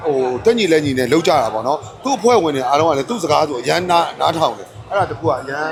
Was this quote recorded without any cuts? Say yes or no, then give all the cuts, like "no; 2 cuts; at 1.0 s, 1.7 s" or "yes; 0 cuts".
yes; 0 cuts